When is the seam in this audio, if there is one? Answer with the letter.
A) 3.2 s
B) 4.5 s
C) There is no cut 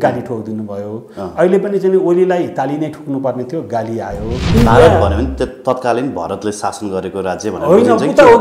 B